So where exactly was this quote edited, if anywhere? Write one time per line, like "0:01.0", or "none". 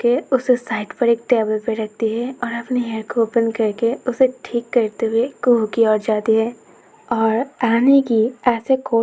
none